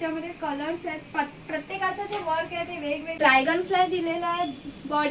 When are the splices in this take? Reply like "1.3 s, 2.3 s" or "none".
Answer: 3.2 s